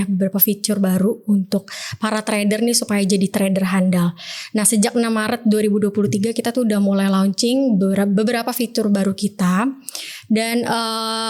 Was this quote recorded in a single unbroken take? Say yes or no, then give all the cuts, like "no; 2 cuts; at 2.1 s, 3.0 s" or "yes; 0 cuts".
yes; 0 cuts